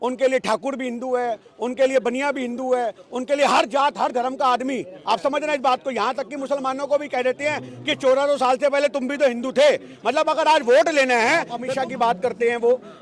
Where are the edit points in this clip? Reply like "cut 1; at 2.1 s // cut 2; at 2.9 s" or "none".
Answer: cut 1; at 11.6 s

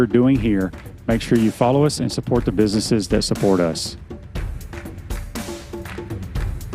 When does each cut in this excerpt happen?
cut 1; at 3.8 s

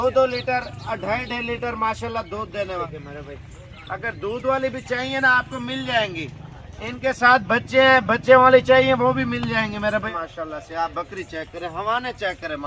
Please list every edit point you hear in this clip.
cut 1; at 2.8 s // cut 2; at 10.1 s

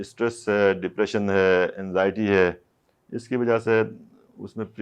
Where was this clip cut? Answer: none

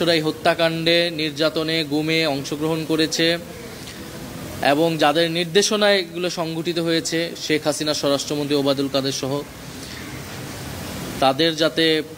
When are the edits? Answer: none

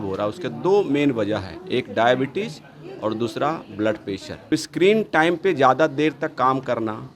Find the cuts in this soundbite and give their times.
cut 1; at 4.5 s

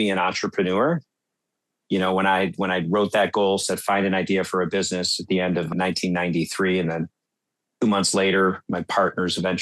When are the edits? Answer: cut 1; at 5.7 s

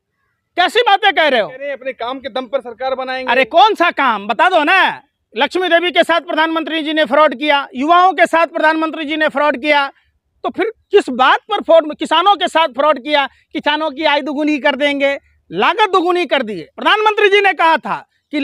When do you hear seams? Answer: cut 1; at 1.7 s // cut 2; at 16.6 s

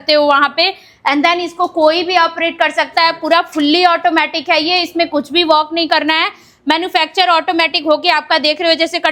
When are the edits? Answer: none

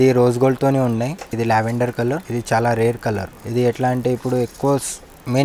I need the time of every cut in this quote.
cut 1; at 1.3 s // cut 2; at 2.2 s // cut 3; at 3.4 s

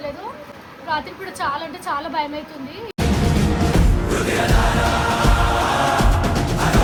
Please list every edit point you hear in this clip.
none

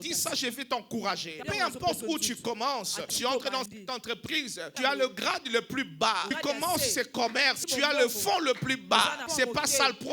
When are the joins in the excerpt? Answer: cut 1; at 1.4 s // cut 2; at 3.1 s // cut 3; at 4.7 s // cut 4; at 6.3 s // cut 5; at 7.6 s // cut 6; at 9.2 s

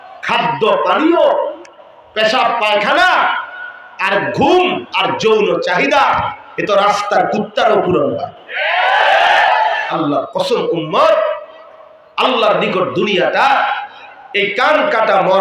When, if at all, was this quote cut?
cut 1; at 9.8 s

